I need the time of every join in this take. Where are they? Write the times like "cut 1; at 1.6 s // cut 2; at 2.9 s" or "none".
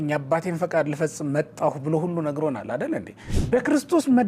cut 1; at 3.3 s